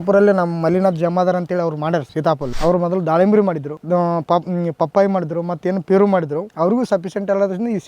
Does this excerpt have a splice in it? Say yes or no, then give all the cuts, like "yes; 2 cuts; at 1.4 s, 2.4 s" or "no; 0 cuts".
yes; 3 cuts; at 2.2 s, 3.7 s, 6.4 s